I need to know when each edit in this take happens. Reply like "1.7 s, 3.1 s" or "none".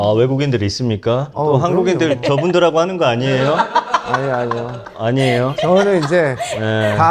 none